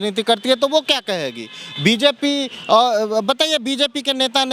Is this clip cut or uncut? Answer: uncut